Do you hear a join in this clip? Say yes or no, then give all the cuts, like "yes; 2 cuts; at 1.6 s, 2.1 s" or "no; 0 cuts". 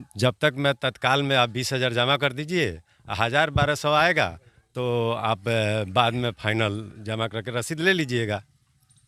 no; 0 cuts